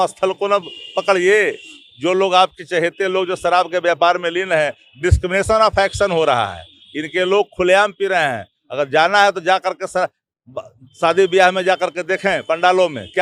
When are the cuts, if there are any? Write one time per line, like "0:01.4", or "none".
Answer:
none